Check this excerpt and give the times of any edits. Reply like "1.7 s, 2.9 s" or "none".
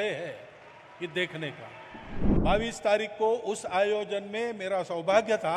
2.2 s